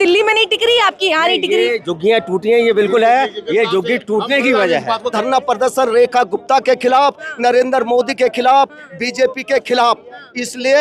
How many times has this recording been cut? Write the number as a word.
one